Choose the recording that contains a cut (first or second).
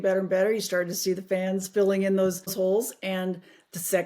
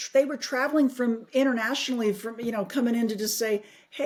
first